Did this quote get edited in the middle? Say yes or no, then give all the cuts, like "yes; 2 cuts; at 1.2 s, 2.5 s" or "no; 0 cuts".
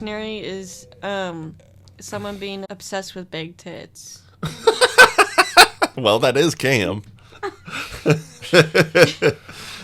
yes; 1 cut; at 2.7 s